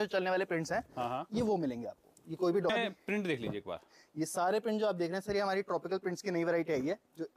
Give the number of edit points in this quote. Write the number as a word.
one